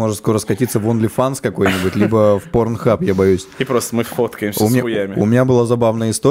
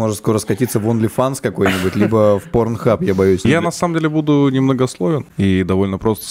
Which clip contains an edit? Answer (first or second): second